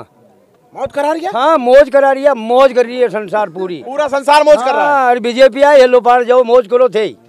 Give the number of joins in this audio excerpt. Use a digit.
0